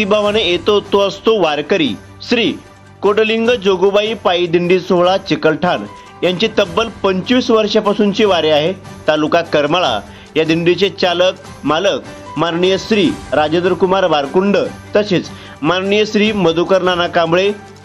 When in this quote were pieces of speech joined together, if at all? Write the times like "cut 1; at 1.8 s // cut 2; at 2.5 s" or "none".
none